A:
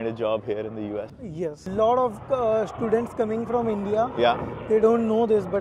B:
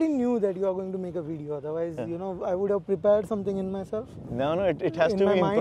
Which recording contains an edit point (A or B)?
A